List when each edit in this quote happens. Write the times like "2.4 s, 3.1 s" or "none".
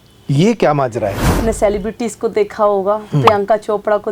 1.4 s